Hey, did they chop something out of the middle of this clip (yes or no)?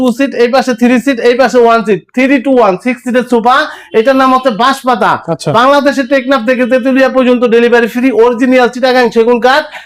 no